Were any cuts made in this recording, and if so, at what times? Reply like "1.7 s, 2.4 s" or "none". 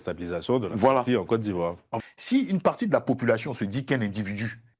1.9 s